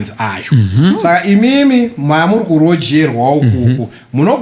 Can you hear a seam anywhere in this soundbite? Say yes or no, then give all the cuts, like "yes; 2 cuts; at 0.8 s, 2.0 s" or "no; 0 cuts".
no; 0 cuts